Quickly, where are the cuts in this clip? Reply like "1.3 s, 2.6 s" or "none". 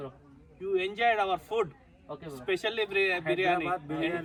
none